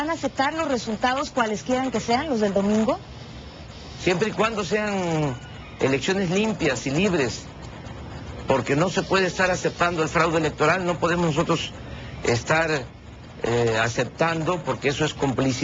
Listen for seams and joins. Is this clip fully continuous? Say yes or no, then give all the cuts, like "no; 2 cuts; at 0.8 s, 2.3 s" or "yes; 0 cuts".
no; 1 cut; at 9.1 s